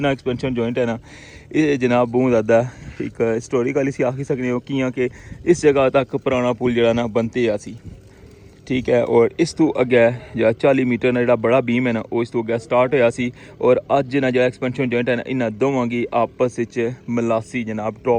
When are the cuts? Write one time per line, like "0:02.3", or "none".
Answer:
none